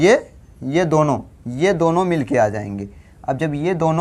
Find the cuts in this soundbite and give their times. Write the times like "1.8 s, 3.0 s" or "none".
none